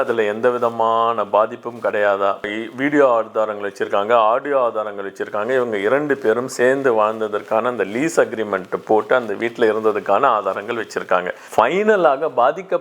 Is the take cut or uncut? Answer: cut